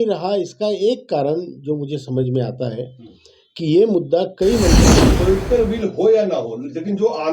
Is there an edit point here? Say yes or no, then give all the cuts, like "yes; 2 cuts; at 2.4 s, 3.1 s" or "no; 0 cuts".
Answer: yes; 1 cut; at 4.8 s